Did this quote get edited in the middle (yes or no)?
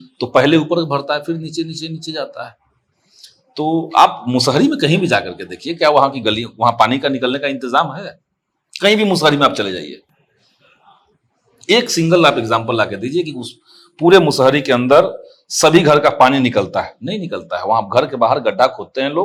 no